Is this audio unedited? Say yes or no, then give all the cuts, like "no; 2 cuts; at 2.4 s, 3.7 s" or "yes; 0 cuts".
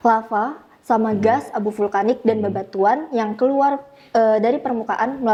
yes; 0 cuts